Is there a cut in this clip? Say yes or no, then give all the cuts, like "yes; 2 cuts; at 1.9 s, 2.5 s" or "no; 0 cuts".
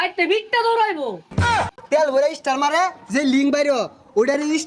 yes; 1 cut; at 1.5 s